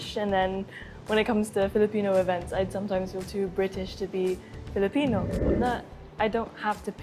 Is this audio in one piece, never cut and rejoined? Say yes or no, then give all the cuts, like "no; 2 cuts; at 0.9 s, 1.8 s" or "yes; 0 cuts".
no; 1 cut; at 5.4 s